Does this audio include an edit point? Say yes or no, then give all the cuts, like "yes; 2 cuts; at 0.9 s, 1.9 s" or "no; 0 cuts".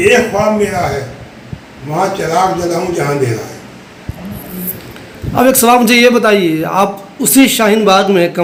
no; 0 cuts